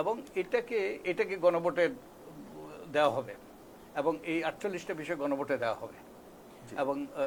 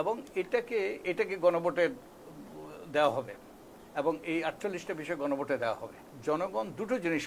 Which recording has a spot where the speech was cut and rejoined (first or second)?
second